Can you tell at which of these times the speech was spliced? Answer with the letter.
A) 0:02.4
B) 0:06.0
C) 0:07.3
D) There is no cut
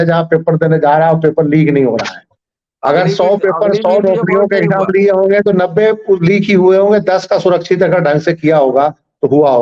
D